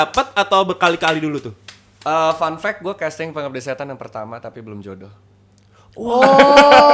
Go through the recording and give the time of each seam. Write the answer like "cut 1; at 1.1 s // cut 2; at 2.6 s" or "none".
none